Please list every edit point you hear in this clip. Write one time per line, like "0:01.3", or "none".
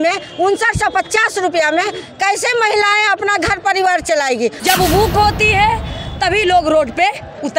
0:04.6